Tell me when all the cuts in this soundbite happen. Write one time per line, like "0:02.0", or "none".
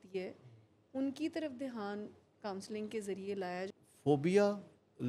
0:03.7